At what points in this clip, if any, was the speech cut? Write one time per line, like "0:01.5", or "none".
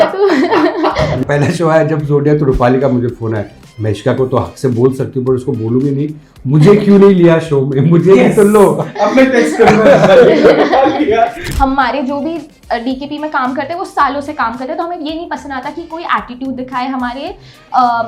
0:01.2
0:11.4